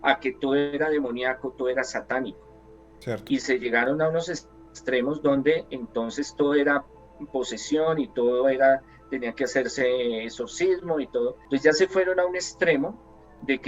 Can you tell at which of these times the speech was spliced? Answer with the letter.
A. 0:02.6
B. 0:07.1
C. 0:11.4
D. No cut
C